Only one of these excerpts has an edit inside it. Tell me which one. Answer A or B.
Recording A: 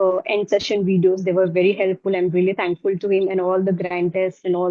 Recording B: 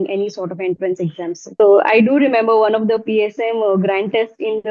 B